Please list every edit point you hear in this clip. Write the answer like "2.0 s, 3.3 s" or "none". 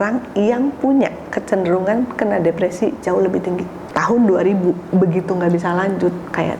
3.8 s